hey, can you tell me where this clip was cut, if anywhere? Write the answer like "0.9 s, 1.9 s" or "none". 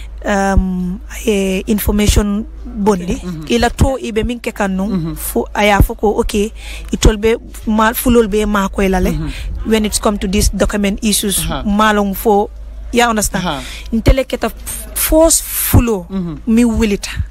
3.3 s